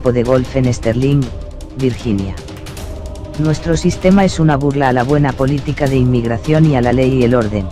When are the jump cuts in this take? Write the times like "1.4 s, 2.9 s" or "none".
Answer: 3.3 s